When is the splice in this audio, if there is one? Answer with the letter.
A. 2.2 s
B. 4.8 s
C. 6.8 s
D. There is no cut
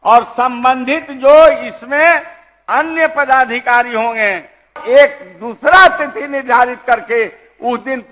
B